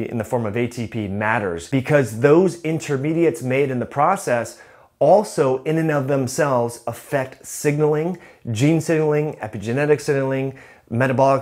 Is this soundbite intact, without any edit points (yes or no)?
no